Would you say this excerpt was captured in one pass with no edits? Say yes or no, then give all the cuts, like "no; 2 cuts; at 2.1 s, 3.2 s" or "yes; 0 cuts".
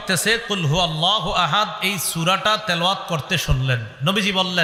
yes; 0 cuts